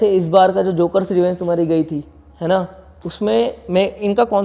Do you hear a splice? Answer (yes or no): no